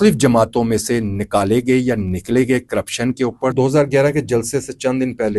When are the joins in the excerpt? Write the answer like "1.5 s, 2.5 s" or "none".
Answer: 3.5 s